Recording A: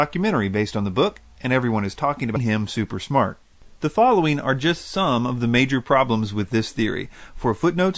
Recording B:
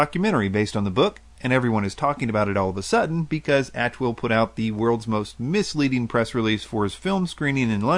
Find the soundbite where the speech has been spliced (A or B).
B